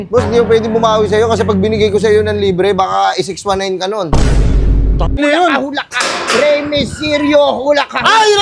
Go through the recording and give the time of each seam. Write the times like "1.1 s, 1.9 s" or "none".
5.2 s